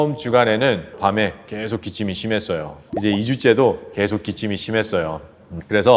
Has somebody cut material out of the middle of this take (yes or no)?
yes